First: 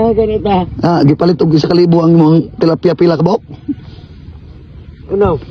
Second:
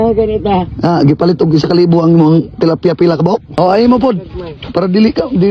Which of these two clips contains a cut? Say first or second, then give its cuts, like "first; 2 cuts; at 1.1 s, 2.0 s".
second; 1 cut; at 3.5 s